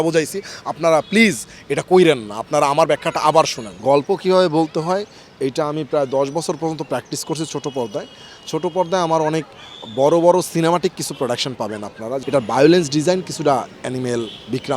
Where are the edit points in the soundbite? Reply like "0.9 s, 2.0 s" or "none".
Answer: 3.6 s, 12.2 s